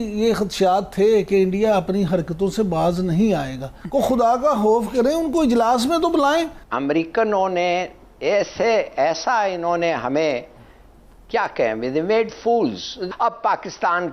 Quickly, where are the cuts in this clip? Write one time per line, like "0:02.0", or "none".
0:03.8
0:06.6
0:13.0